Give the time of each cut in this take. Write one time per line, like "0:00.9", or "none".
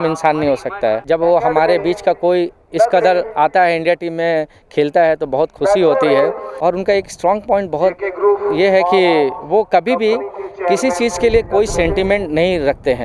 0:01.0
0:06.5

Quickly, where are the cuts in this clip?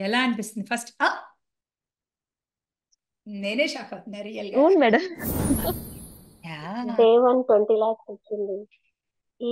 0:05.9

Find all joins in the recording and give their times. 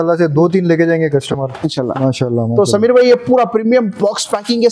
0:01.9

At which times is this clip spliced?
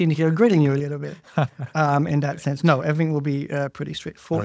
none

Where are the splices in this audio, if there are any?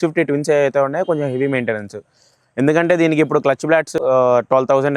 0:04.0

